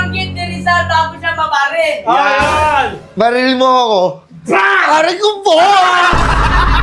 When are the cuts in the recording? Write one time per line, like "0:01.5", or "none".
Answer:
none